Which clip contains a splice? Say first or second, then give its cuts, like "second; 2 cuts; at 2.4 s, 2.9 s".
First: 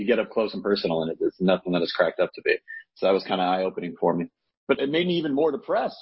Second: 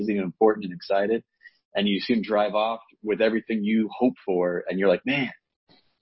first; 1 cut; at 4.7 s